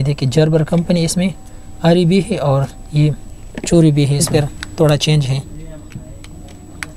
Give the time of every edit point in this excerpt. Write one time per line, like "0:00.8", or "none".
0:04.3